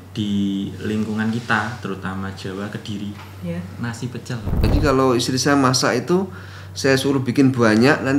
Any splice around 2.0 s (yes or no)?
no